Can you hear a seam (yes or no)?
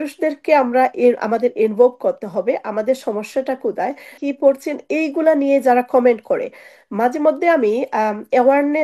yes